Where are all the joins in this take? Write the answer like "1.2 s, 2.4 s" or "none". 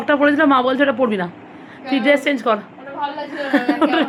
none

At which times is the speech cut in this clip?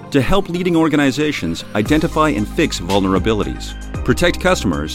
none

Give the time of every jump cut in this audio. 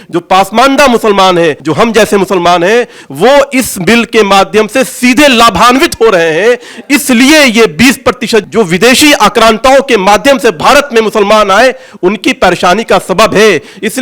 1.6 s, 8.5 s

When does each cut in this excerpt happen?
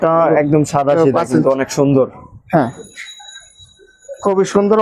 none

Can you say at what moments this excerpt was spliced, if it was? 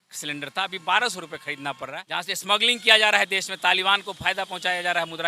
2.1 s

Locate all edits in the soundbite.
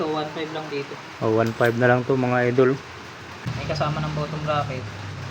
3.5 s

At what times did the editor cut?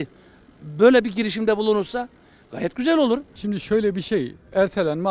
3.3 s

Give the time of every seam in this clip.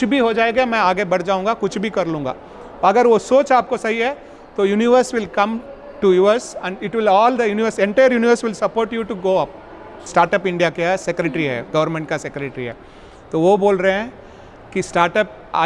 10.0 s

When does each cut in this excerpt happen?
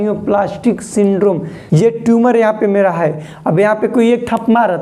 1.5 s

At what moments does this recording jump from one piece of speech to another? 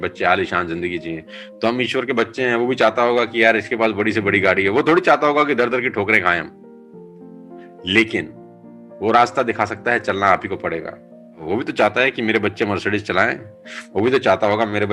6.5 s, 7.8 s, 11.4 s

